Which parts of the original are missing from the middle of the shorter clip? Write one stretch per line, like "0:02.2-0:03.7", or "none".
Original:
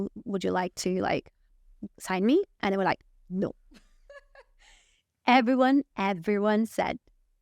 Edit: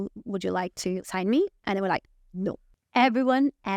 0:01.0-0:02.0
0:03.7-0:05.0